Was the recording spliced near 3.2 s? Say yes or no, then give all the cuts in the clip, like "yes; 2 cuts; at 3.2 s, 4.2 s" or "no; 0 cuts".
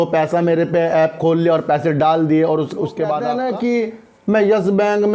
yes; 1 cut; at 3.2 s